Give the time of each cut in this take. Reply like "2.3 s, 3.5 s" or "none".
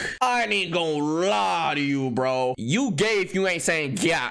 2.6 s

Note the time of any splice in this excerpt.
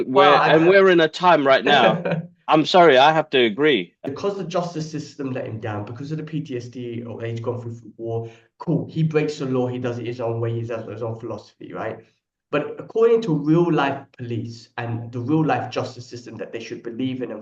4.0 s

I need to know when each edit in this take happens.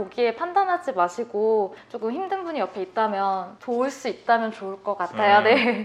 none

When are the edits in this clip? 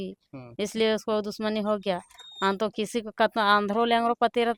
none

